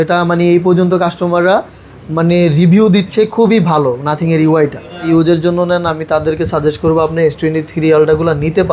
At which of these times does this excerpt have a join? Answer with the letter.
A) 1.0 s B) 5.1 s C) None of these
B